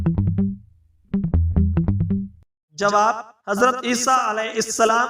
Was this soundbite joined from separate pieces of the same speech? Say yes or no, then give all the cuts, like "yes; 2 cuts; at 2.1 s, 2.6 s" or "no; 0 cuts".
yes; 1 cut; at 2.4 s